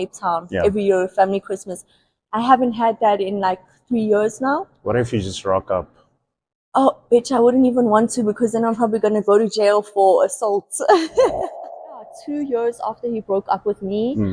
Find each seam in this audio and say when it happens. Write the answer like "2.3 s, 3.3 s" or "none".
12.0 s